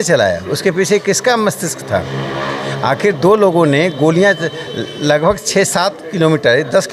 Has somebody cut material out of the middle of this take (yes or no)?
no